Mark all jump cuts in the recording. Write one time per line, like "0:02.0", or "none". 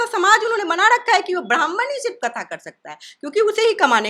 none